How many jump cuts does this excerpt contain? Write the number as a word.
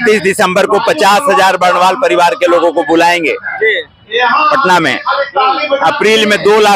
zero